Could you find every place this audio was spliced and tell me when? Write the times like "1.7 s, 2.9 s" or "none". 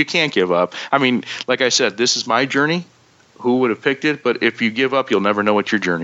none